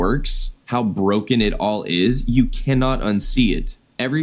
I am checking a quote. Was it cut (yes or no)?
no